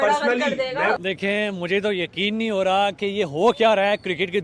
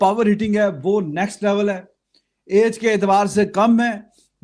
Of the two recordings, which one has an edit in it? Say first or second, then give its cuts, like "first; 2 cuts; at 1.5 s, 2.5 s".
first; 1 cut; at 1.0 s